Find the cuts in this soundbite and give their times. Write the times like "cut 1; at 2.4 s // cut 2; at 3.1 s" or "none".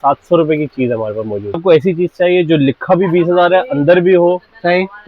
cut 1; at 1.6 s